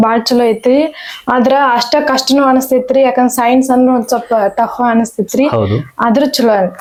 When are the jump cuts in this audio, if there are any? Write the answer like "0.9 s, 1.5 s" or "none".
none